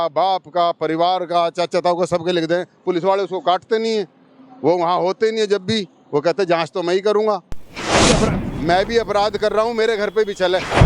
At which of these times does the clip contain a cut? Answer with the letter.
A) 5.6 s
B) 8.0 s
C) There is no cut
B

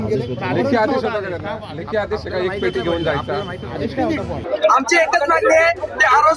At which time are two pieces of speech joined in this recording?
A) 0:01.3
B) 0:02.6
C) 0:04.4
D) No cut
C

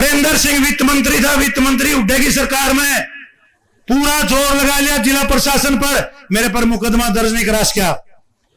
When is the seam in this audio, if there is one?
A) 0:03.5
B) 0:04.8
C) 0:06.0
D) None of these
D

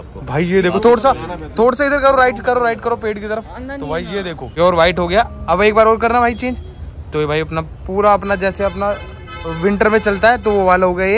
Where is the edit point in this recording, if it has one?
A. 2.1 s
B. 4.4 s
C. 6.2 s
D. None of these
B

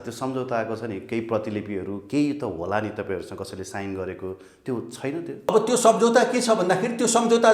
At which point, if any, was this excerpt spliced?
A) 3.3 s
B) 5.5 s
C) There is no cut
B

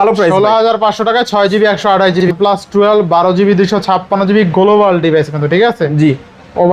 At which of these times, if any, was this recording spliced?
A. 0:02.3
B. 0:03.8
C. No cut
A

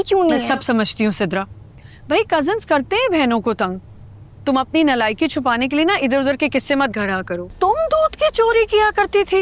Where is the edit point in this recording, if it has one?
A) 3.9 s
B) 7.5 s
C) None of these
B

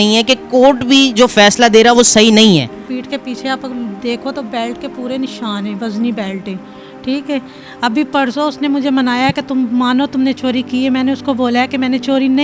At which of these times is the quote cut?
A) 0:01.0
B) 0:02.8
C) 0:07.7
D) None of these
B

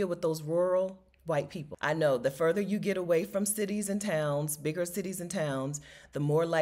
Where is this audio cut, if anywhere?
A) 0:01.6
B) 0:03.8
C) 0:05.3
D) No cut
A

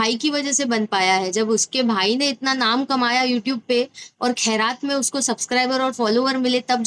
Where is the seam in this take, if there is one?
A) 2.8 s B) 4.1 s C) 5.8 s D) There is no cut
D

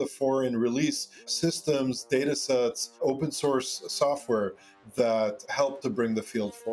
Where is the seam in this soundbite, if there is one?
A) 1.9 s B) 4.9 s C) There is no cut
C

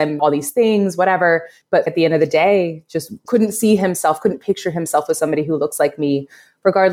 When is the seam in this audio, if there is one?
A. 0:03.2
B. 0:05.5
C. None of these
C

